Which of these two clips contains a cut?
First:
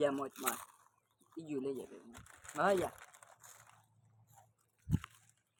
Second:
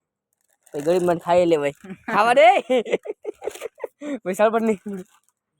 second; 1 cut; at 2.9 s

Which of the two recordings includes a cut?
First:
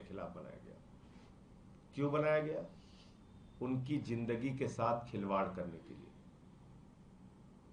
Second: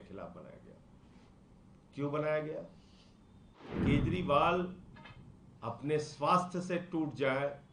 second; 1 cut; at 3.7 s

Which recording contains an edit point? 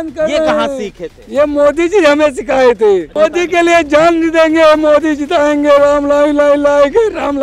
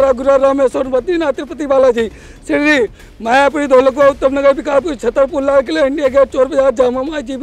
first; 1 cut; at 3.1 s

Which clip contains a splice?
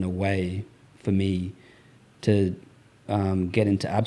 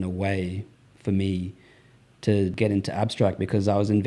second; 1 cut; at 2.6 s

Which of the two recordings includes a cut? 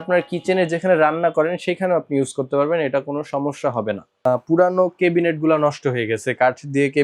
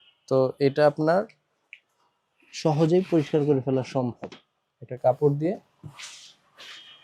first; 1 cut; at 4.3 s

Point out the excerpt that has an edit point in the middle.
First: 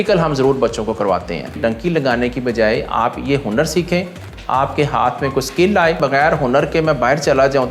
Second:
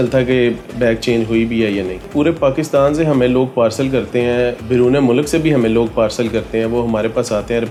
first; 2 cuts; at 1.6 s, 6.0 s

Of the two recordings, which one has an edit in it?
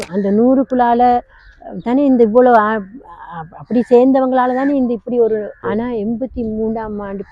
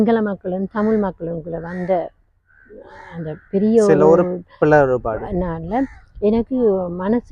first; 1 cut; at 5.6 s

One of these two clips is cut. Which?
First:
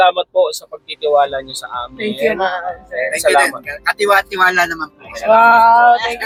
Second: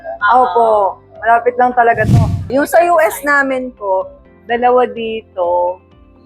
second; 1 cut; at 2.3 s

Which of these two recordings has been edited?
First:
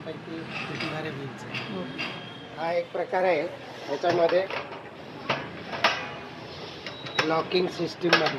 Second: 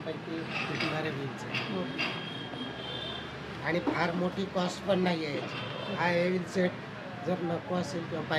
first; 1 cut; at 2.4 s

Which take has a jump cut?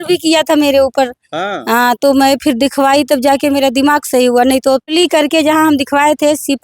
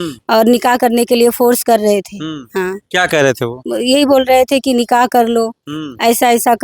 first; 1 cut; at 4.8 s

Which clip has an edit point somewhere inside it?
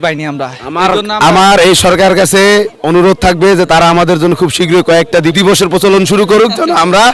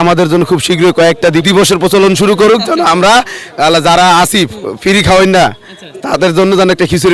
first; 1 cut; at 2.8 s

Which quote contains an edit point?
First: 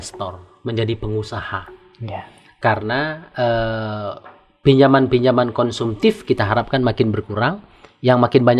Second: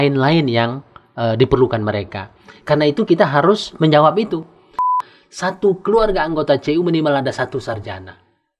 second; 1 cut; at 4.9 s

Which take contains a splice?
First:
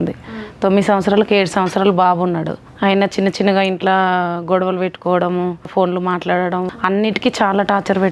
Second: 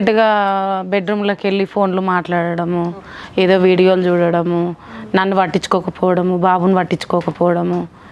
first; 3 cuts; at 2.6 s, 5.7 s, 6.7 s

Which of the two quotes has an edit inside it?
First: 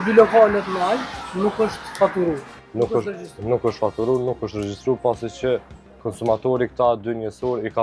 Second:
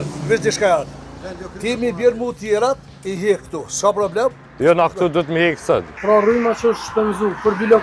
second; 1 cut; at 5.9 s

